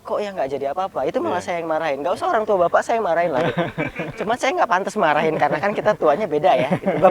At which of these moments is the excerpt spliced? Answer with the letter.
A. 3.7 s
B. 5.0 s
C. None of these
C